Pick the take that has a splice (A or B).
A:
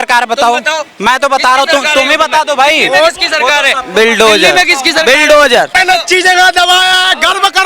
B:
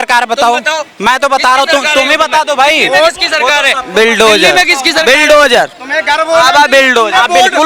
A